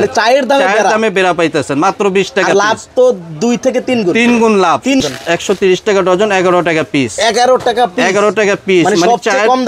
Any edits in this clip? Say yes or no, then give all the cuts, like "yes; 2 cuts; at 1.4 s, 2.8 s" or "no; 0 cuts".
yes; 1 cut; at 5.0 s